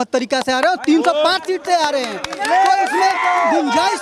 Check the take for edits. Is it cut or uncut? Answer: uncut